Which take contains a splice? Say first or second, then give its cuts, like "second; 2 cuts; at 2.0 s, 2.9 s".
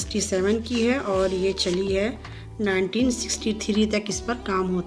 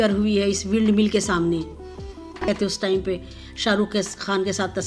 second; 1 cut; at 2.5 s